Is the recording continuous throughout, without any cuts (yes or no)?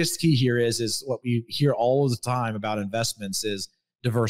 yes